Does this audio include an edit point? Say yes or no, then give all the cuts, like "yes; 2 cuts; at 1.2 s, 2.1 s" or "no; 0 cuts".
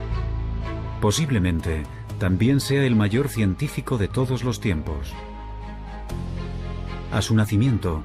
yes; 1 cut; at 1.2 s